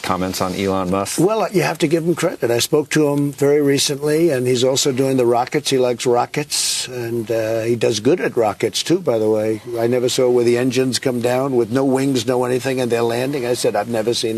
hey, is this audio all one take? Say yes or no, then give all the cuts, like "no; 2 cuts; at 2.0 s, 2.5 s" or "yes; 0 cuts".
yes; 0 cuts